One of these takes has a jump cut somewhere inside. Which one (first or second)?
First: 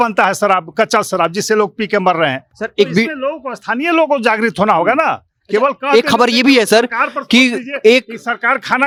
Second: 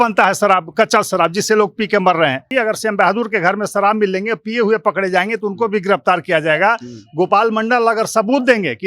second